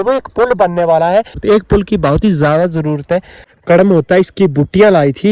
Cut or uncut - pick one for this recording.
cut